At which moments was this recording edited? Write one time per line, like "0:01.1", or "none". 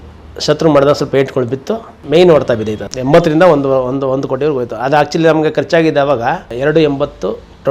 none